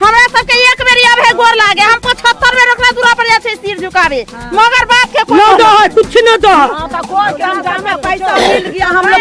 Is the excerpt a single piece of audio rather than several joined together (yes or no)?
yes